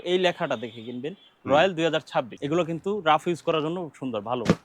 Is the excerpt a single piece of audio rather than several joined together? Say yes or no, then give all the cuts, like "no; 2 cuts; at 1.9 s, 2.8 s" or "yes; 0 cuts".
no; 1 cut; at 2.4 s